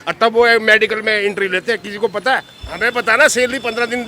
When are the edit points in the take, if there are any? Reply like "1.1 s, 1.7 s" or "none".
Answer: 2.6 s